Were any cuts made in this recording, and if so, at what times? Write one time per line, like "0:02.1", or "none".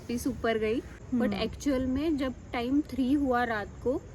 0:01.0